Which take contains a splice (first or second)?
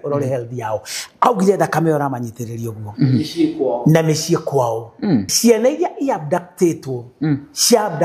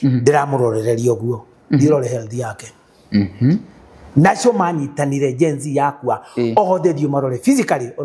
first